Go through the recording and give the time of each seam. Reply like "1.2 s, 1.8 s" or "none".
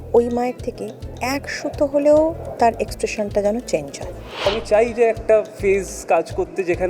4.5 s